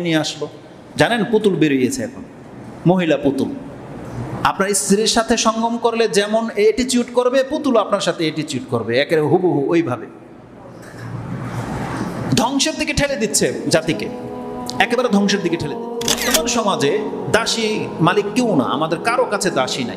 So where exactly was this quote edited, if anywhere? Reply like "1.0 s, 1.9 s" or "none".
16.2 s